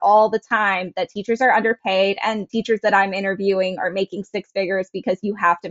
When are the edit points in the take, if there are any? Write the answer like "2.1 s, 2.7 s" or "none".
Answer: 2.5 s